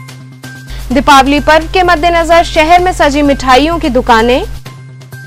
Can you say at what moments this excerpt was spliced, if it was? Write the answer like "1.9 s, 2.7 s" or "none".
none